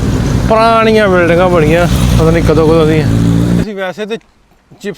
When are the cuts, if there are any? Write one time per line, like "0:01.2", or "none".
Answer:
0:03.6